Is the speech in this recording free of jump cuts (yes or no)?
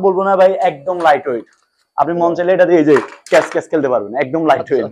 yes